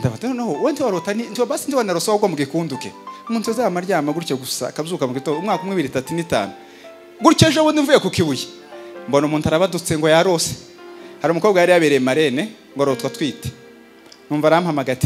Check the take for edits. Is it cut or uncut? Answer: uncut